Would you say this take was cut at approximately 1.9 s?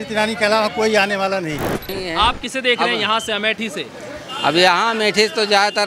yes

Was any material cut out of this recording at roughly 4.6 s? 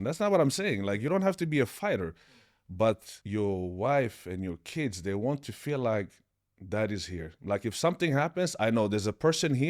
no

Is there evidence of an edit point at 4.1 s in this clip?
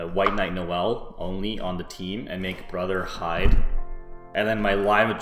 yes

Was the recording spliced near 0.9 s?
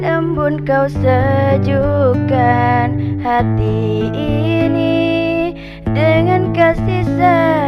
no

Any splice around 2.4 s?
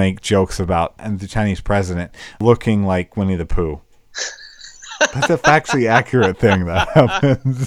yes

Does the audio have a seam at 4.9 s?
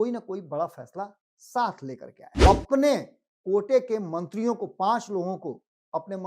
no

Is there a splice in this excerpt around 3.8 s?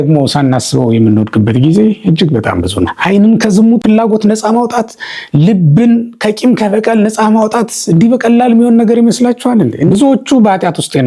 yes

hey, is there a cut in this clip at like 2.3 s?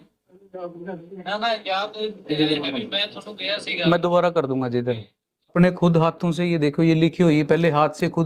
no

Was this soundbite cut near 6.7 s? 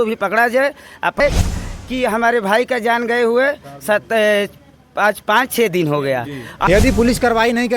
yes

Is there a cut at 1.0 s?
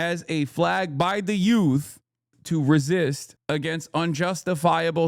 no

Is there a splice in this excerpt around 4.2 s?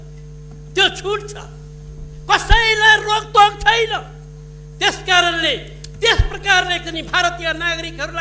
no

